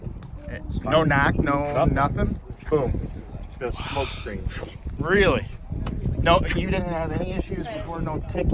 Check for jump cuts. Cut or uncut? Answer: uncut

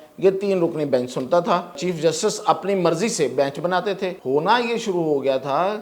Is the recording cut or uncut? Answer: cut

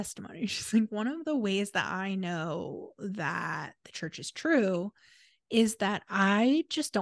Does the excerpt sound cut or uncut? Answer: uncut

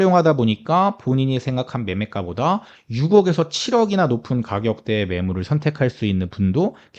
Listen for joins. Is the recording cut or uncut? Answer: uncut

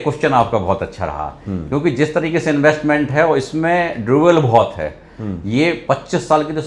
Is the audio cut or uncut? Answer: uncut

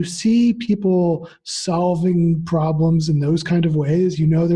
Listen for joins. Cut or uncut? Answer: uncut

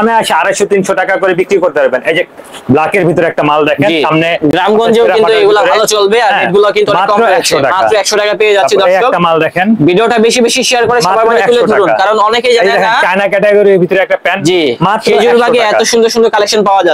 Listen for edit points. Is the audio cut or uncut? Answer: uncut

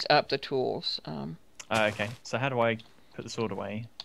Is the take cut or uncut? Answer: cut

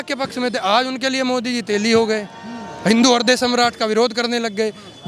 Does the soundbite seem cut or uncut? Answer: uncut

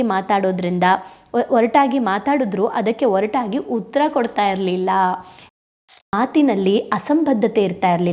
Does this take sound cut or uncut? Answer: cut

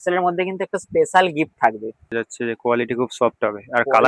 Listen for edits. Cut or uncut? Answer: cut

